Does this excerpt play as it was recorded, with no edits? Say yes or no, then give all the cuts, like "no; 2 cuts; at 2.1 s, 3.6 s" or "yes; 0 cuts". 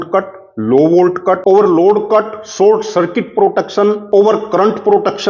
yes; 0 cuts